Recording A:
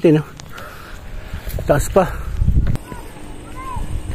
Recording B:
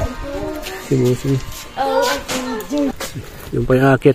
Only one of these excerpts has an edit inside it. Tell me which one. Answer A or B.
A